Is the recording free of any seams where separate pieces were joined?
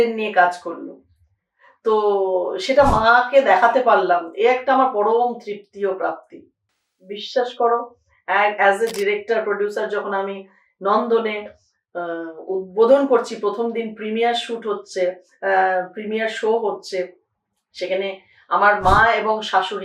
yes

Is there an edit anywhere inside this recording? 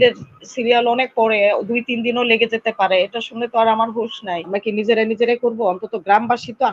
yes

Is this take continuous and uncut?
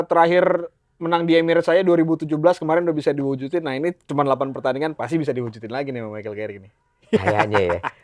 yes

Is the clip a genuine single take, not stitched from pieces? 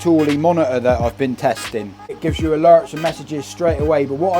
no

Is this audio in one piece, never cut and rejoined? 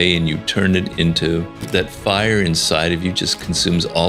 no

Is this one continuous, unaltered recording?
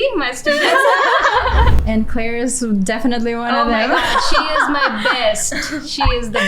no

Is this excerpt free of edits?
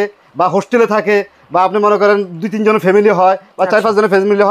yes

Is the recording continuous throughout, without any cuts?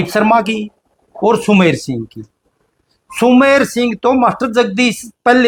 yes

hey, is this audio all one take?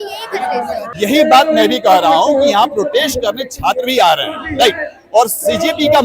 no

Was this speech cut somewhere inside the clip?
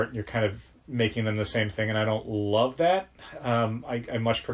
no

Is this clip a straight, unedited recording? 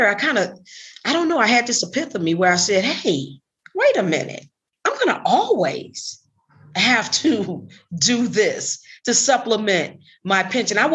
yes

